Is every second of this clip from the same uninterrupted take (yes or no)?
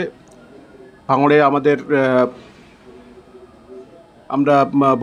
yes